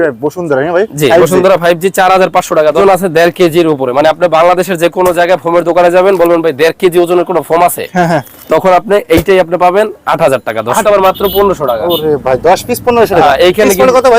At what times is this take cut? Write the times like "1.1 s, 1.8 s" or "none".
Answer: 2.8 s, 10.8 s